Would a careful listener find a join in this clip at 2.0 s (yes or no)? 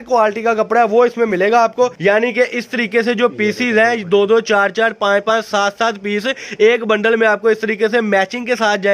yes